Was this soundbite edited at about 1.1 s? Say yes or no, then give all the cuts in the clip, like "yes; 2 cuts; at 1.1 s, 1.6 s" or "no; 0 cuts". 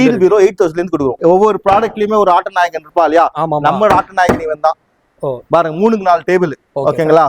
yes; 1 cut; at 1.1 s